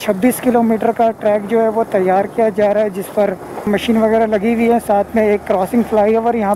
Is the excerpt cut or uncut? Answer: cut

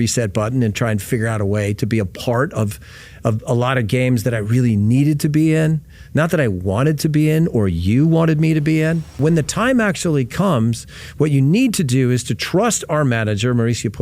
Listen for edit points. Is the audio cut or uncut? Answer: cut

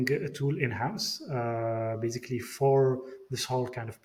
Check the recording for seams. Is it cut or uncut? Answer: uncut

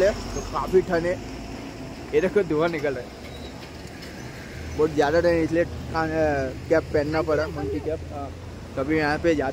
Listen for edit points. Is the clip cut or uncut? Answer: uncut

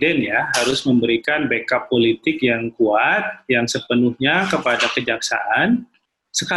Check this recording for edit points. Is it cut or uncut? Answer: uncut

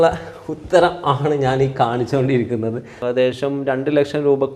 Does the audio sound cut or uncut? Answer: cut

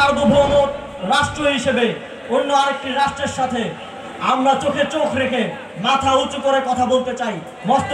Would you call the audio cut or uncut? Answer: uncut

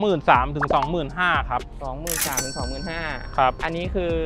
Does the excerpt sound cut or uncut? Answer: uncut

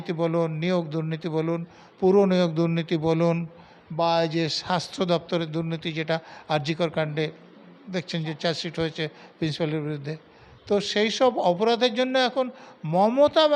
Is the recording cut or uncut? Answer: uncut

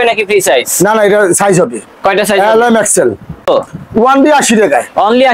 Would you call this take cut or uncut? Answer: cut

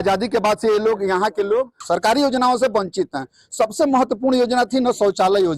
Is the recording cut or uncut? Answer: cut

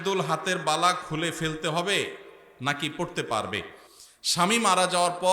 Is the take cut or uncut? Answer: uncut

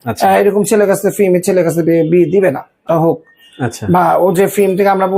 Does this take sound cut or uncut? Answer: cut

